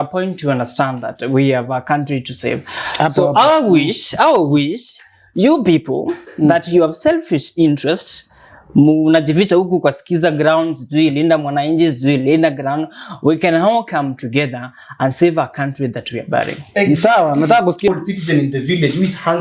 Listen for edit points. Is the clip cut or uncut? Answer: cut